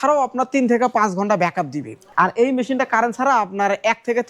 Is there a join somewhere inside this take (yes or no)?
yes